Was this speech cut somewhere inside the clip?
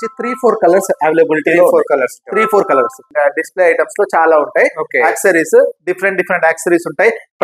yes; 1 cut; at 3.0 s

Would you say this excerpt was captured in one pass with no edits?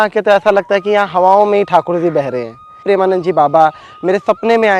no; 1 cut; at 2.8 s

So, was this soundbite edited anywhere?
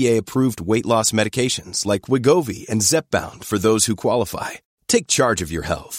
no; 0 cuts

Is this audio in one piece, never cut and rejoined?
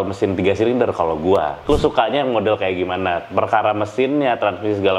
no; 1 cut; at 1.7 s

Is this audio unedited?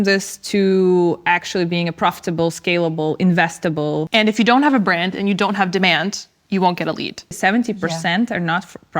no; 2 cuts; at 4.1 s, 7.4 s

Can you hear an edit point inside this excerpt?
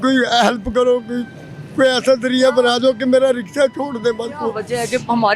no; 0 cuts

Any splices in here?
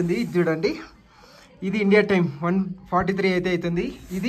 no; 0 cuts

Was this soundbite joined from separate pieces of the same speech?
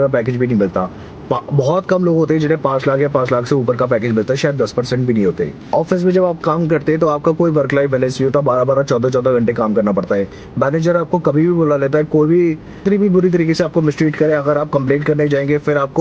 yes; 2 cuts; at 5.6 s, 12.8 s

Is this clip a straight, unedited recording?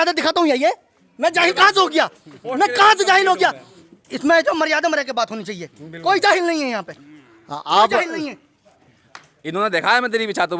yes; 0 cuts

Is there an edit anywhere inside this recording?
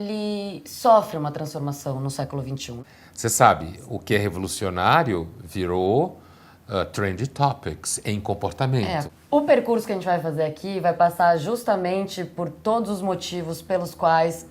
yes; 2 cuts; at 2.6 s, 9.1 s

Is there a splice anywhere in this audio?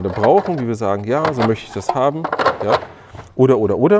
no; 0 cuts

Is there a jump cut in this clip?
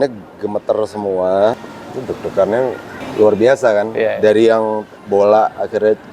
yes; 3 cuts; at 1.6 s, 3.0 s, 4.9 s

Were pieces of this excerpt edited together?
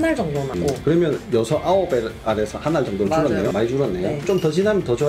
no; 0 cuts

